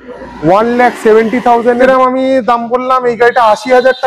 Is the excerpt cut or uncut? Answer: cut